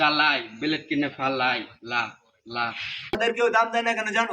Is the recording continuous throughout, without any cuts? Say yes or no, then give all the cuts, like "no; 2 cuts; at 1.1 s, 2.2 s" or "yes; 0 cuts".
no; 1 cut; at 3.1 s